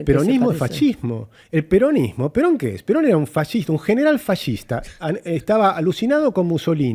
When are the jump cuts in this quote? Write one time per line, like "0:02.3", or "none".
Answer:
none

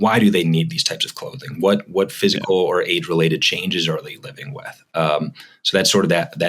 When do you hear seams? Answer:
none

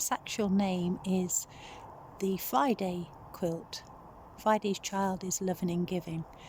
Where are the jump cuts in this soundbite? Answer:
none

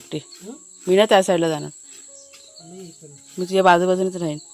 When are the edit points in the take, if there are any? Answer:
none

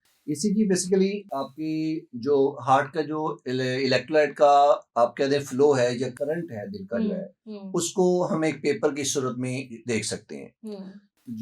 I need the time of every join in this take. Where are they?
0:01.2

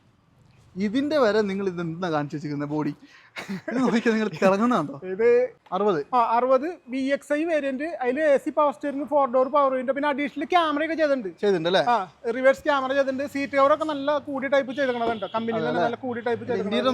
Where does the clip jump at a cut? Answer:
0:05.6

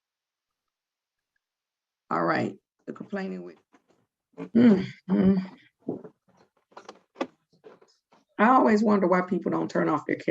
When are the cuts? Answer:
0:03.5

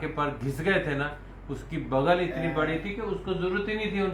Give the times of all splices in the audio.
none

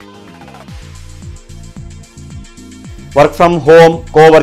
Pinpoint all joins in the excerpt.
0:02.5

